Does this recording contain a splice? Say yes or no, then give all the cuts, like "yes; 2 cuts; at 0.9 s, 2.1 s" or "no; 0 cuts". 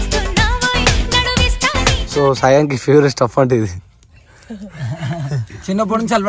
yes; 1 cut; at 2.0 s